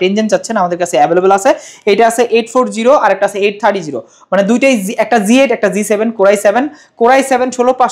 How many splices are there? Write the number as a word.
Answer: zero